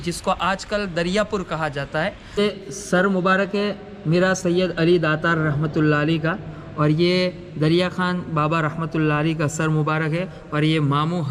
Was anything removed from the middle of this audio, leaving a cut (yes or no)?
yes